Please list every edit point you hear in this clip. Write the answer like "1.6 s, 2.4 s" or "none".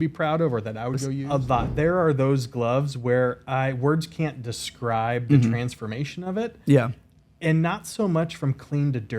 1.1 s